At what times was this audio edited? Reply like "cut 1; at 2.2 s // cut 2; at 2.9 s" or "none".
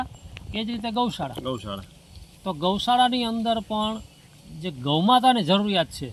none